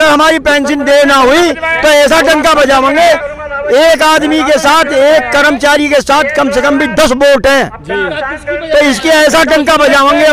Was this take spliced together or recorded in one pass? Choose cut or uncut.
uncut